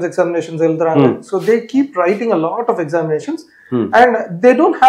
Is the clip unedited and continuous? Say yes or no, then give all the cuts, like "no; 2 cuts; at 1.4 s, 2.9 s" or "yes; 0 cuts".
yes; 0 cuts